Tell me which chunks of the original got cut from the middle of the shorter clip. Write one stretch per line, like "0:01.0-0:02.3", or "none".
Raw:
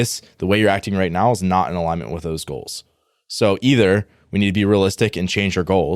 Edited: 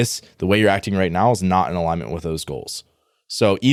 none